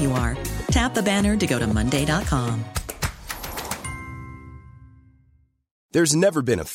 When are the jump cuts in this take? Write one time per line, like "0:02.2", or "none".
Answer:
0:05.7